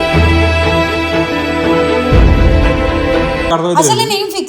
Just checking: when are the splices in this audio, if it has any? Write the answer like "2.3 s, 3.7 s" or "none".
3.5 s